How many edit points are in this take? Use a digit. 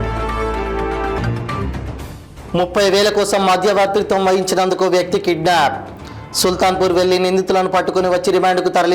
1